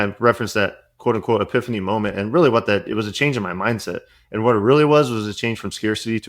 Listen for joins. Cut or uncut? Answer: uncut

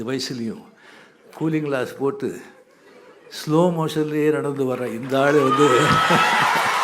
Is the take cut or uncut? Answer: uncut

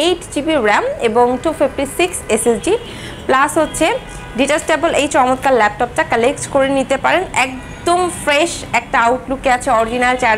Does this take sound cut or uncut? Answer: cut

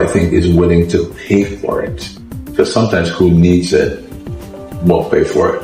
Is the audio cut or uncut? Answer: uncut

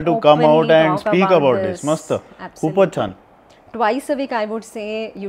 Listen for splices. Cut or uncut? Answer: cut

